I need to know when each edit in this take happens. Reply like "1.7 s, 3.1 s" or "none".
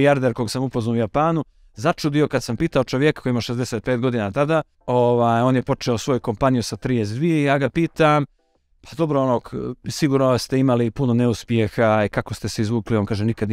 4.8 s